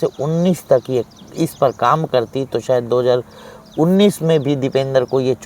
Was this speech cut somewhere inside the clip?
no; 0 cuts

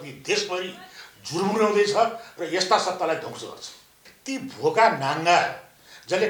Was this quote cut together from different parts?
yes; 1 cut; at 4.0 s

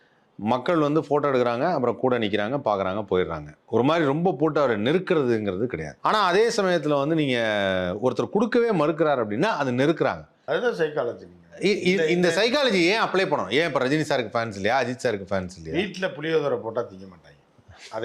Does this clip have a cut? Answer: yes; 2 cuts; at 5.9 s, 10.3 s

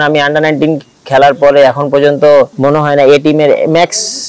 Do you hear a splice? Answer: yes; 1 cut; at 2.5 s

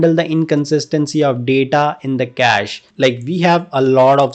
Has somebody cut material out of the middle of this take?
yes; 1 cut; at 2.8 s

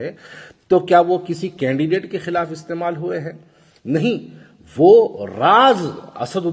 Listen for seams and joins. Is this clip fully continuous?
yes; 0 cuts

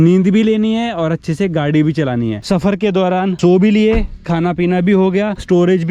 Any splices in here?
yes; 1 cut; at 2.4 s

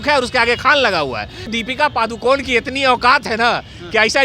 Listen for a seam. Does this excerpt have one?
yes; 1 cut; at 1.5 s

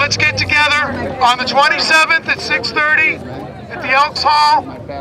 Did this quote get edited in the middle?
no; 0 cuts

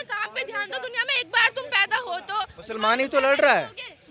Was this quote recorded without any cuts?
yes; 0 cuts

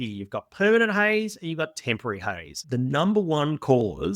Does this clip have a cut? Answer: yes; 1 cut; at 2.5 s

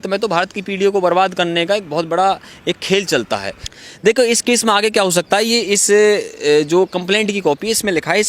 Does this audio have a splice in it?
yes; 1 cut; at 3.6 s

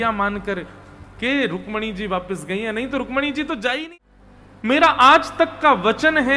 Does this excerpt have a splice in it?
yes; 1 cut; at 3.9 s

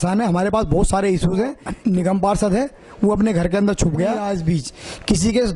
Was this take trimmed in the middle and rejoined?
yes; 2 cuts; at 1.7 s, 4.2 s

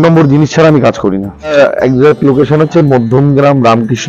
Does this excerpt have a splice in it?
yes; 1 cut; at 1.5 s

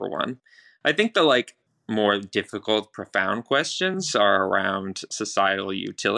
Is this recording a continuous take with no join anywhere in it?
no; 1 cut; at 1.6 s

